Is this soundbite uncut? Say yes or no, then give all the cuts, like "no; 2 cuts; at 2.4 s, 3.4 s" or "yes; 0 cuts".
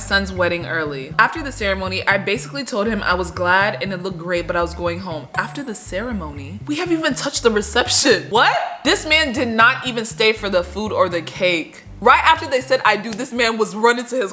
no; 3 cuts; at 1.0 s, 8.3 s, 11.9 s